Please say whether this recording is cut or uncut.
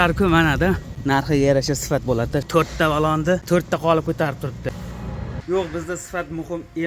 cut